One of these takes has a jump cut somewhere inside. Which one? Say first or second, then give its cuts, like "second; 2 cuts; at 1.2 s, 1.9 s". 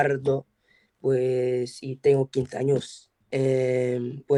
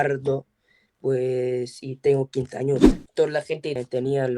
second; 1 cut; at 3.0 s